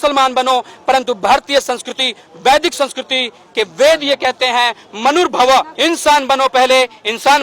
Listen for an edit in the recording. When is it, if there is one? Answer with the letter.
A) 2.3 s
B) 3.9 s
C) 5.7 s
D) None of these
C